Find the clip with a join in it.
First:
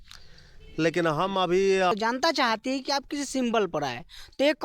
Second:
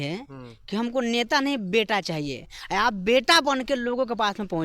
first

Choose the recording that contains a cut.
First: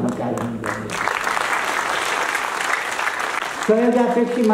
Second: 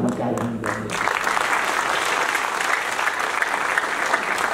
first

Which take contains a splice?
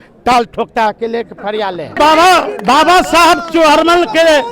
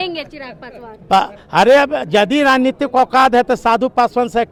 first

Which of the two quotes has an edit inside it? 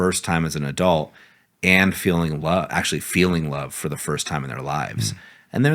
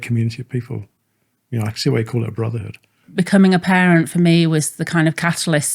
second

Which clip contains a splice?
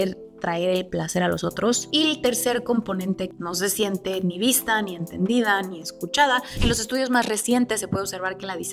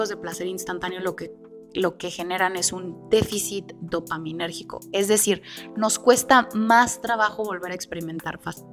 first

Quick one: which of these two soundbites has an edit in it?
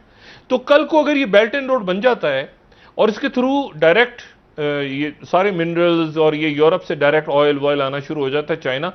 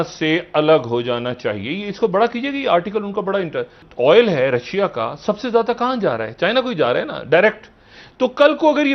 second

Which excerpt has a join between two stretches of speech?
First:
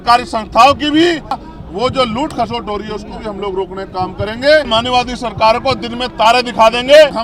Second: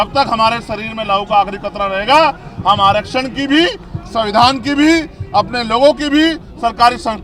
first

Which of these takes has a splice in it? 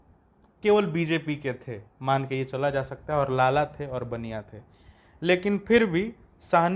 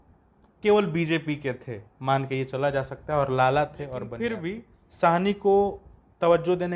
second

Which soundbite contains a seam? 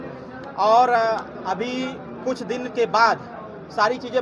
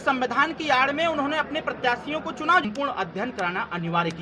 second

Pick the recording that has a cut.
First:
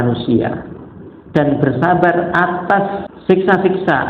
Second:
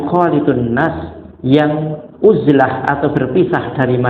first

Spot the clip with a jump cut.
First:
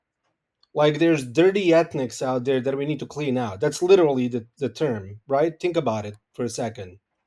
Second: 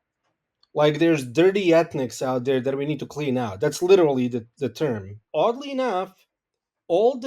second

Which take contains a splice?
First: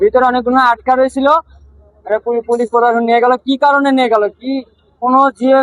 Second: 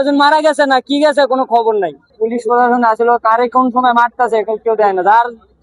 second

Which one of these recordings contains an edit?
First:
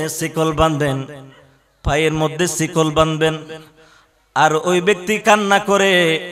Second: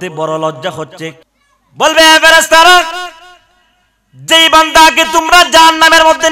second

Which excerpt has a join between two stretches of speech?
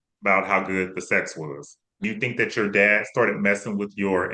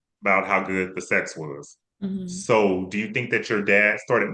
first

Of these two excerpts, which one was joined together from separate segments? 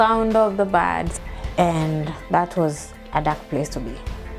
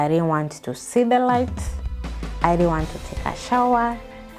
first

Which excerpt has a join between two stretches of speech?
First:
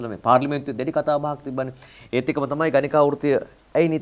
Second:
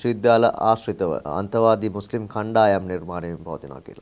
second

